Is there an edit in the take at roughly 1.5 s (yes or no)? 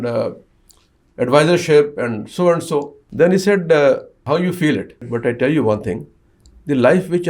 no